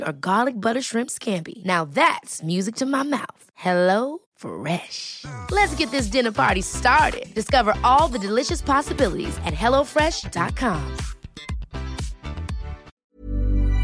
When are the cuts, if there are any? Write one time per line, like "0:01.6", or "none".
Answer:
0:12.9